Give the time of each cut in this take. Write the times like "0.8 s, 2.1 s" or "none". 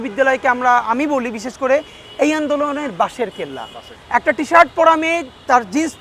3.7 s